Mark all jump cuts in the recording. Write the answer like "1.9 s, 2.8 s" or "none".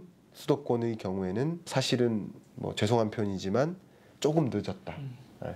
1.7 s

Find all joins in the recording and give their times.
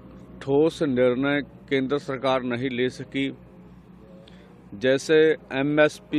none

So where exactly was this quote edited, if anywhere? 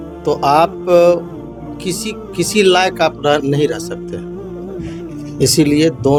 none

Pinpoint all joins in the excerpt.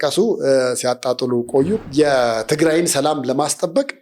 1.8 s

